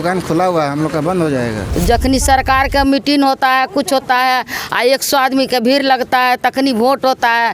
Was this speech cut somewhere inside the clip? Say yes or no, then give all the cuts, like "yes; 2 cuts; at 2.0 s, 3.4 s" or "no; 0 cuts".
yes; 1 cut; at 1.6 s